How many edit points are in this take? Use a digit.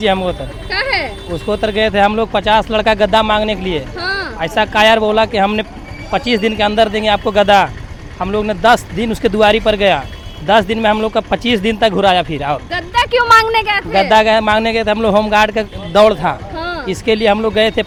0